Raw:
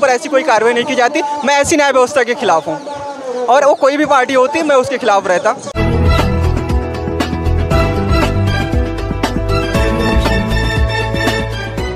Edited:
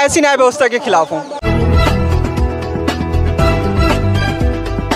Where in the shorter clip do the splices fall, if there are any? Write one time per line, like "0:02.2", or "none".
0:01.4